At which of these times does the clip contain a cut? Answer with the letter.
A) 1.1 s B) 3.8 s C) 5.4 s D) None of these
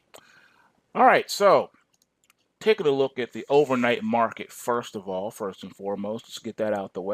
C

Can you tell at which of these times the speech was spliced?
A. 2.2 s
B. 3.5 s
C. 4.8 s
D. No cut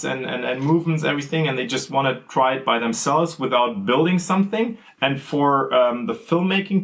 C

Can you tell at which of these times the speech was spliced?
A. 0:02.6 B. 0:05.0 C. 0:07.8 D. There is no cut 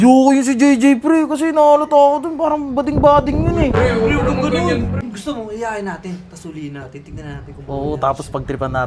B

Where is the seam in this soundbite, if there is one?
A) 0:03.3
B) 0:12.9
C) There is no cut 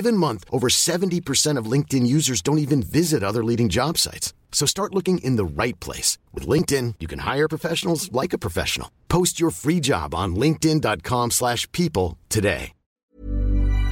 B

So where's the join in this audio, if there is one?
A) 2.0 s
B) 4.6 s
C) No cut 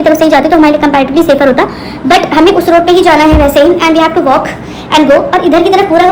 C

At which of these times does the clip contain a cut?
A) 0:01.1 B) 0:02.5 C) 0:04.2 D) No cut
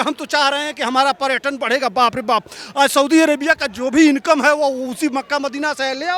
D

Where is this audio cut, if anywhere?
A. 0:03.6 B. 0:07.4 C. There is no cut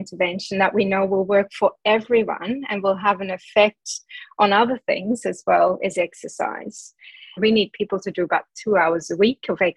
B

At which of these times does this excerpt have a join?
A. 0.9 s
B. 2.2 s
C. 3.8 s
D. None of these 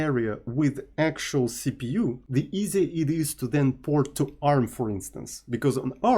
B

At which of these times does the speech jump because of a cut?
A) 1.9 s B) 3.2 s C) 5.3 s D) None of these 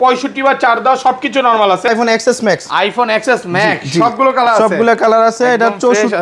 A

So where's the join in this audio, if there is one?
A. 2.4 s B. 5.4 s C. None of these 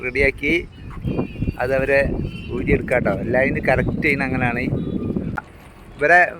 B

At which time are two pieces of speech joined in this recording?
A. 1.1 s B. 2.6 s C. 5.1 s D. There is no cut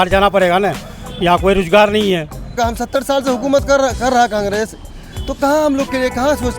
B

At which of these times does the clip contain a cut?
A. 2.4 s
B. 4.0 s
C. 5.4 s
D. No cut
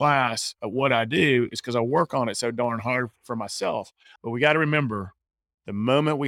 B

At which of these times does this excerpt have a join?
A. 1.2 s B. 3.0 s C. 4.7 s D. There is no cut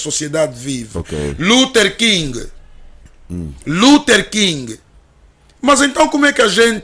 D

